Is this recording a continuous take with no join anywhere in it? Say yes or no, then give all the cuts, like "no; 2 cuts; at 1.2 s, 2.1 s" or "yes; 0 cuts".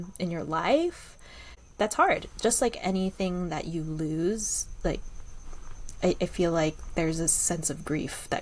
no; 1 cut; at 1.6 s